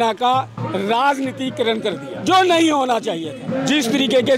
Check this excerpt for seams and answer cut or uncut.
cut